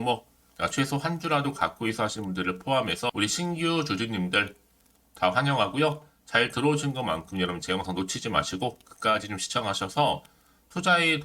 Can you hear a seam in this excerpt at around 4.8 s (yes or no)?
no